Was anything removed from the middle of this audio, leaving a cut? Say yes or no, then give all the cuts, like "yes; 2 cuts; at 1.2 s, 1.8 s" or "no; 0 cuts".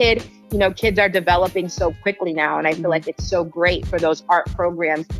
no; 0 cuts